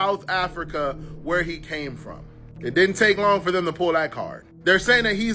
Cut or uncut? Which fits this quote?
uncut